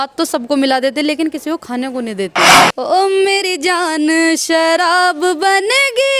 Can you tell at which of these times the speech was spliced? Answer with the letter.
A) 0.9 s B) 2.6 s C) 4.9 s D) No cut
B